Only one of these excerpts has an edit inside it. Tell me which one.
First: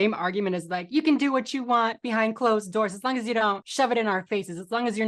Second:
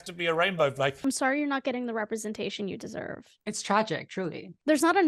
second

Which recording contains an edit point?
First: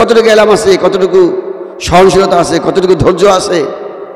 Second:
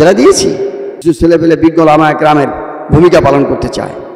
second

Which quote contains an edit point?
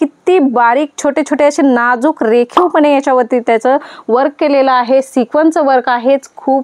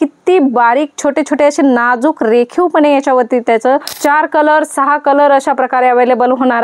second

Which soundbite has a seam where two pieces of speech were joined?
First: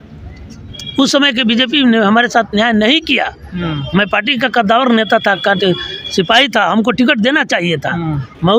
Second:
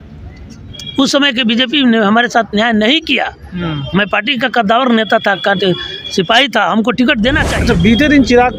second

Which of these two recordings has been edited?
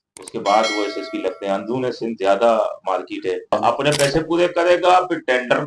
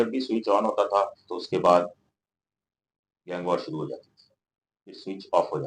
first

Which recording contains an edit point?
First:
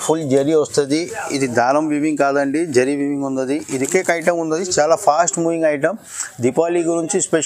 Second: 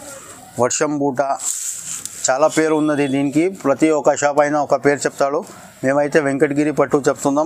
first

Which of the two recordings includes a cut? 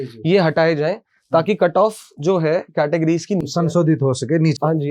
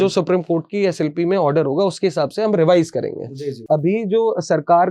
second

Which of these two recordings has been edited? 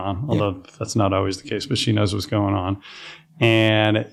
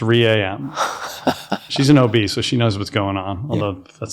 second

